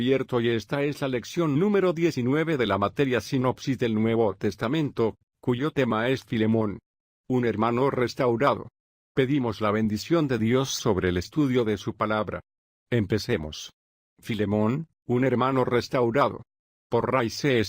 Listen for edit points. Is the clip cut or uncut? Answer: cut